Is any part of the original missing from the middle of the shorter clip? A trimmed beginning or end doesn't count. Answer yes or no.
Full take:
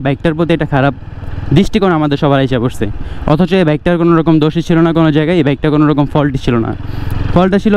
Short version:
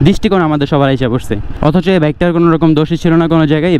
yes